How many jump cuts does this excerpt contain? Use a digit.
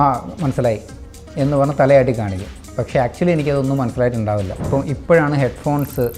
1